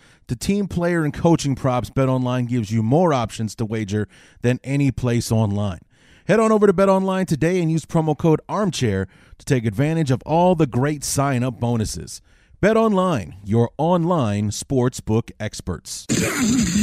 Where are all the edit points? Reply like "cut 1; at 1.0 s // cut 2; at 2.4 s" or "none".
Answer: cut 1; at 15.9 s